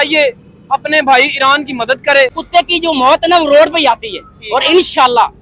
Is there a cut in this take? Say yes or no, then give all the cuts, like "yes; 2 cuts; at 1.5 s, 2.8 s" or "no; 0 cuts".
yes; 1 cut; at 2.4 s